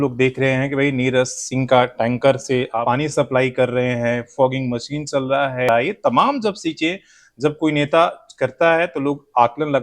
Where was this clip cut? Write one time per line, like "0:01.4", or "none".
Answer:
0:02.7
0:05.7

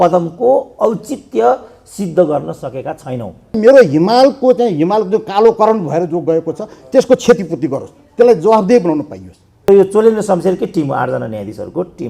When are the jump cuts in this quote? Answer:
0:03.6
0:09.7

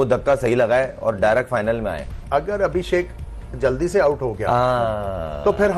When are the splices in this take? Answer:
0:02.1

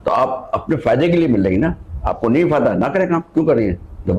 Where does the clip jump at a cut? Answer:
none

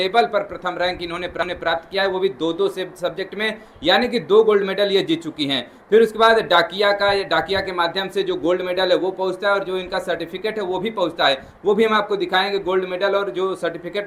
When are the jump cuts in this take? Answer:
none

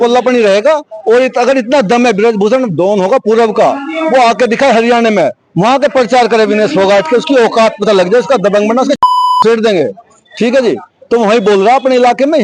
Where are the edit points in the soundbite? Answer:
none

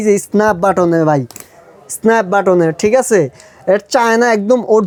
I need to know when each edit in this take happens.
none

